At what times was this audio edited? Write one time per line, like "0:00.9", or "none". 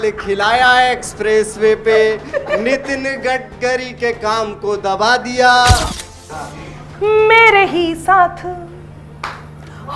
0:05.9